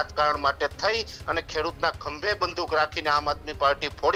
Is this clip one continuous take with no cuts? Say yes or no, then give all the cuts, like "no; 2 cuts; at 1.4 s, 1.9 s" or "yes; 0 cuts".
yes; 0 cuts